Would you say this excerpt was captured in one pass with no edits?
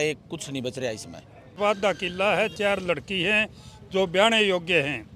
no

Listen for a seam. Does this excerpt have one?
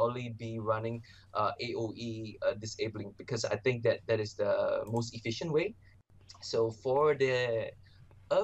yes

